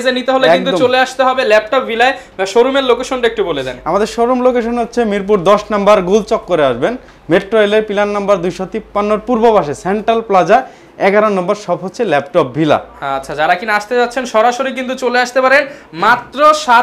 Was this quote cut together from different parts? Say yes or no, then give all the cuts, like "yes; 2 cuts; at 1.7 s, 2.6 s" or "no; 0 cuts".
no; 0 cuts